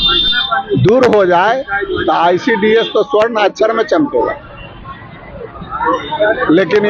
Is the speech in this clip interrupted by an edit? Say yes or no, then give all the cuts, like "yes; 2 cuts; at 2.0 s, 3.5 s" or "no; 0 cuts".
no; 0 cuts